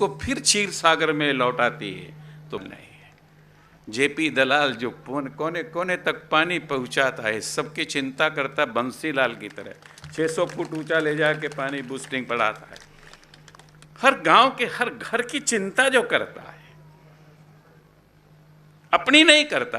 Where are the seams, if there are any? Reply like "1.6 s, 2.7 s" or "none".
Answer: 2.6 s